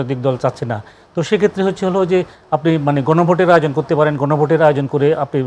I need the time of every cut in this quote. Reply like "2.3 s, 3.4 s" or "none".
none

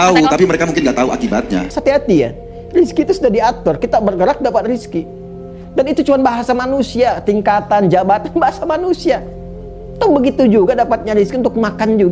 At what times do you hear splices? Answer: 1.7 s

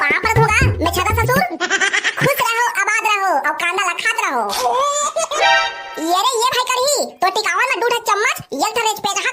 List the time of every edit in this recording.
5.4 s

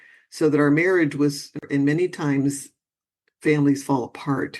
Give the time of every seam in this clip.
1.6 s

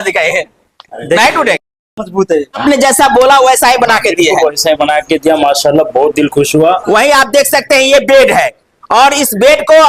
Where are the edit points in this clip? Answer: 2.6 s, 6.8 s

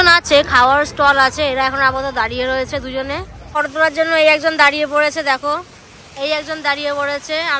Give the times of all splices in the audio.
3.6 s

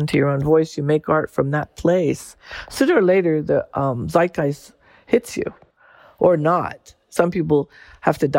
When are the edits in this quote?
5.9 s

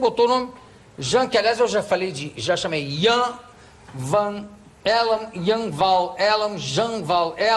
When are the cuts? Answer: none

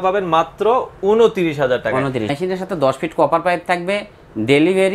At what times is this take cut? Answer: 2.3 s

